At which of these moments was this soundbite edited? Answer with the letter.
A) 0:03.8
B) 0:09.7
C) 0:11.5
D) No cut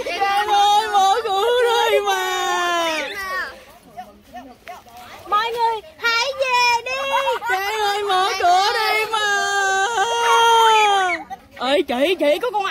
C